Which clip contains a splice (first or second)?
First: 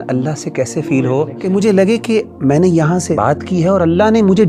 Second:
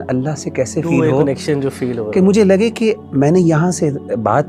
first